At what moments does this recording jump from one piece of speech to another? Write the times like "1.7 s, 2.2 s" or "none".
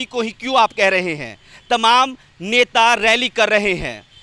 none